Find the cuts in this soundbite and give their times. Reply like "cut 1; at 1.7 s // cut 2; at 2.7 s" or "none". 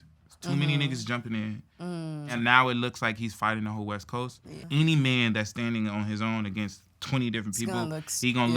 cut 1; at 2.3 s // cut 2; at 4.6 s